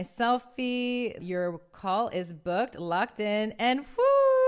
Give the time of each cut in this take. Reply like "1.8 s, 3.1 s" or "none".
1.2 s